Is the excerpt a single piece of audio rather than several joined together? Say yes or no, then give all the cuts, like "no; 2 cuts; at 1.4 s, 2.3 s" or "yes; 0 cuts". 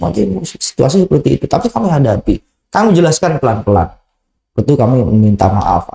yes; 0 cuts